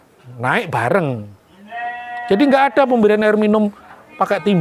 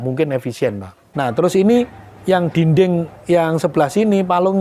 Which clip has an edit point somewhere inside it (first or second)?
second